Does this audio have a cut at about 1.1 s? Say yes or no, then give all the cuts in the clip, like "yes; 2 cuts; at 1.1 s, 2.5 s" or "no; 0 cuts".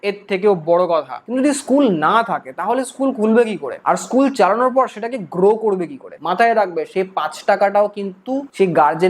yes; 2 cuts; at 1.1 s, 6.2 s